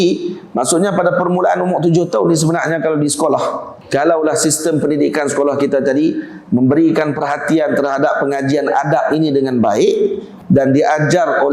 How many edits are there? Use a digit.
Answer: 2